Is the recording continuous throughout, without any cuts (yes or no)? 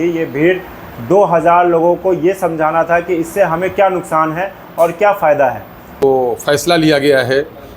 no